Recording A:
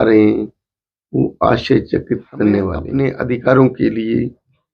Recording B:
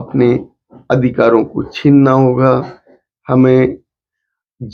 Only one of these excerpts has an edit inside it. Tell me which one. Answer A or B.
A